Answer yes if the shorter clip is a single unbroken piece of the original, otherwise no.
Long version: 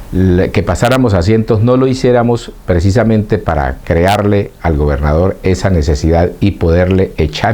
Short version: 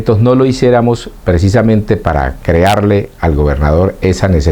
yes